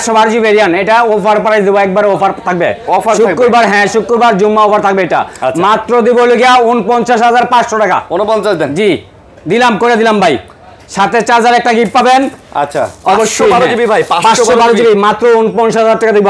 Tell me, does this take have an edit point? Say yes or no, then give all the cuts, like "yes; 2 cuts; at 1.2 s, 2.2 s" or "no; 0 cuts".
no; 0 cuts